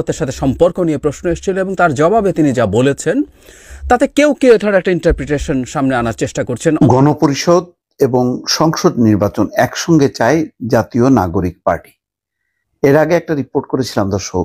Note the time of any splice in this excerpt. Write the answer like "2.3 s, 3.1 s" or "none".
6.8 s